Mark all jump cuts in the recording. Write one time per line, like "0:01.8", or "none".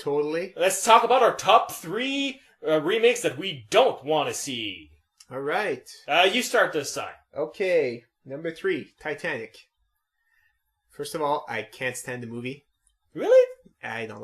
0:09.0